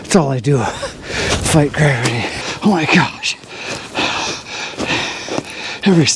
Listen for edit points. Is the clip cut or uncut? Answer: cut